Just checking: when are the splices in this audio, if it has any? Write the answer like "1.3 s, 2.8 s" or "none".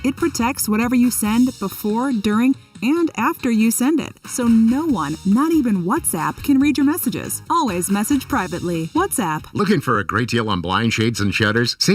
9.5 s